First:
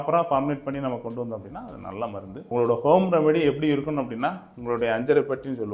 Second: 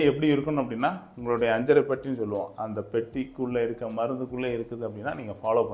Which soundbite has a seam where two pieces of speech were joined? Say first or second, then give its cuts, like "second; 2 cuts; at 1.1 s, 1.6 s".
first; 1 cut; at 2.4 s